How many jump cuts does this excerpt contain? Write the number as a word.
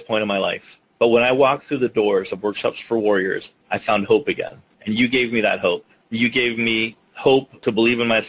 two